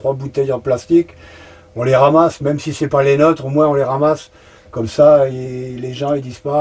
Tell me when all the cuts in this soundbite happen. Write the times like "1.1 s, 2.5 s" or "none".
none